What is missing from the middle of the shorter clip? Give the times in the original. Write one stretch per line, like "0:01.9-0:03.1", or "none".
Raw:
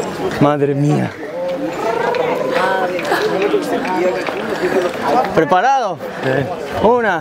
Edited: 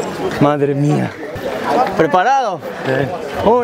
0:01.5-0:04.9